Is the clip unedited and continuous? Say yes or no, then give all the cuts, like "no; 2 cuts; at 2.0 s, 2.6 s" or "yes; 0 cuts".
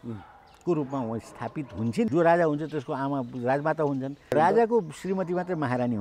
no; 2 cuts; at 2.1 s, 4.3 s